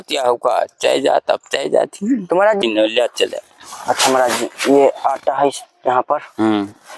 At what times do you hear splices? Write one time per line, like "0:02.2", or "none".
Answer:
0:02.6